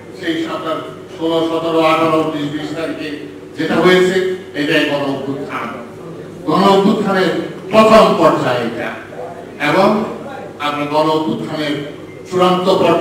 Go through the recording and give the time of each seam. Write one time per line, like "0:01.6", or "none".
none